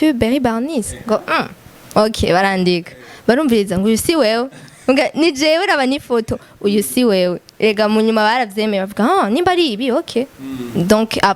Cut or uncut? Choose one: uncut